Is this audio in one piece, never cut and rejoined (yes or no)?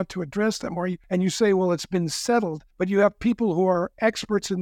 no